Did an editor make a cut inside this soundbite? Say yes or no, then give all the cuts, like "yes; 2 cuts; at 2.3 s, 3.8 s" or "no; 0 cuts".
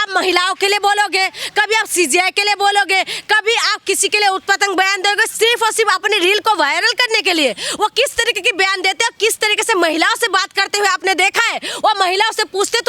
no; 0 cuts